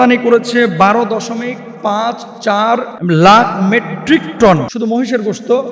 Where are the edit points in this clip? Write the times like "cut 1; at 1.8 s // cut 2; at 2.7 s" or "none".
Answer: cut 1; at 2.9 s // cut 2; at 4.7 s